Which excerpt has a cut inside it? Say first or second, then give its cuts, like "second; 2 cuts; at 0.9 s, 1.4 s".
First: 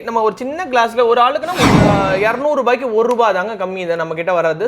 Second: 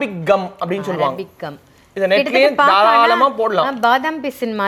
first; 1 cut; at 1.9 s